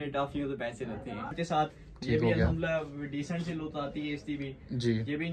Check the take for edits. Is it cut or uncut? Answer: cut